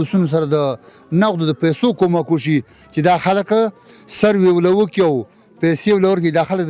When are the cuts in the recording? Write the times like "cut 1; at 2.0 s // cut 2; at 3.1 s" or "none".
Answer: none